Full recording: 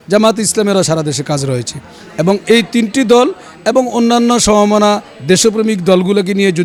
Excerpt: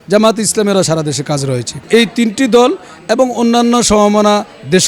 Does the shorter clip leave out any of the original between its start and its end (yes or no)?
yes